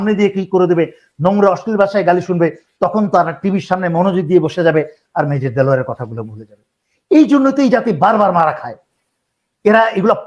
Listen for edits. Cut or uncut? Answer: uncut